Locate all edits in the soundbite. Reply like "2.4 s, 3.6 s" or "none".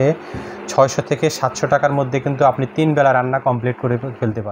none